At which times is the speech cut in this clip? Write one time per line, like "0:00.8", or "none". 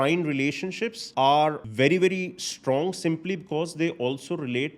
0:01.0
0:01.6